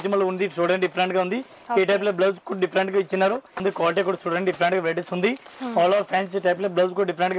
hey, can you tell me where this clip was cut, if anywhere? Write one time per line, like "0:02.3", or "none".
0:03.6